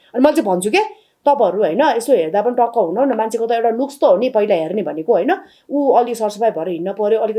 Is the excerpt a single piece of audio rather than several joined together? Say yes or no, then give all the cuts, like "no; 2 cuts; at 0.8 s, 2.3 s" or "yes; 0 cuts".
yes; 0 cuts